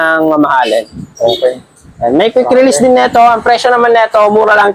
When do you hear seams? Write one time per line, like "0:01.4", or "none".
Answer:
none